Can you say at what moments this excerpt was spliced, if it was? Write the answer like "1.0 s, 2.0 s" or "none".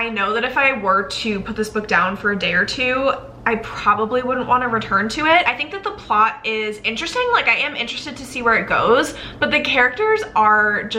none